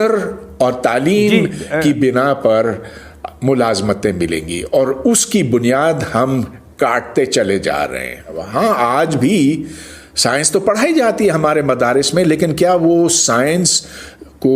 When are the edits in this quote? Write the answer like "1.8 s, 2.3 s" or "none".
8.4 s